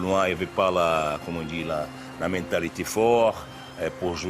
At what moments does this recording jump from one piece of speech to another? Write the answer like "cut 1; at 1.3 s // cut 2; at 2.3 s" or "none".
none